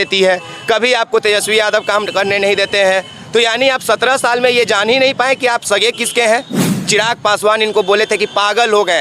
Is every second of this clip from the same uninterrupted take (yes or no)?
no